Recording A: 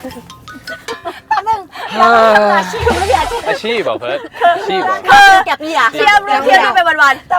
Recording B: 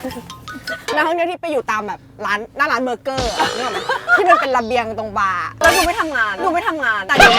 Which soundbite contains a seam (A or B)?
B